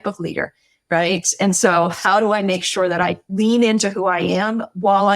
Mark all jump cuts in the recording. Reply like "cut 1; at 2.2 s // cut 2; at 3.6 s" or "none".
cut 1; at 3.3 s